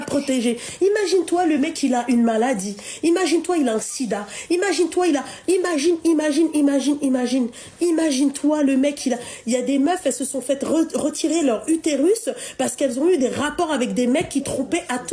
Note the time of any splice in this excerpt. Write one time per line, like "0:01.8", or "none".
none